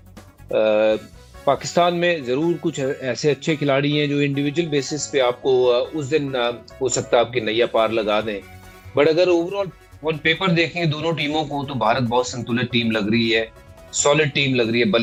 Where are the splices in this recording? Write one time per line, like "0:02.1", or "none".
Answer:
none